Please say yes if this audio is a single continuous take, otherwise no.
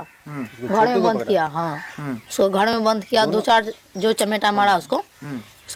yes